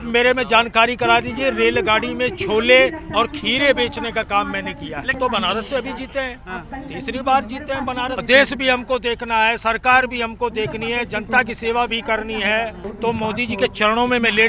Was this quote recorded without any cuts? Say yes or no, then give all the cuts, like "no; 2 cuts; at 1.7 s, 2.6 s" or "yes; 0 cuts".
no; 3 cuts; at 5.1 s, 8.2 s, 12.8 s